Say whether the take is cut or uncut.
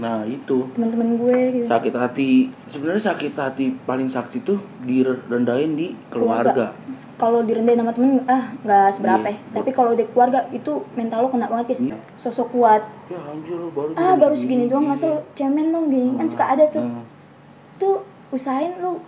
cut